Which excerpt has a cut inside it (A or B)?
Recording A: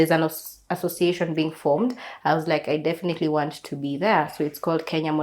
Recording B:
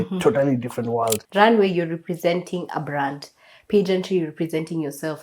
B